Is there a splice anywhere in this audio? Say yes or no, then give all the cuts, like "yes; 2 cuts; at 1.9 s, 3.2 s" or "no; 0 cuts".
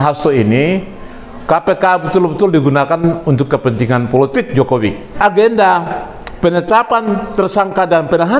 yes; 1 cut; at 5.0 s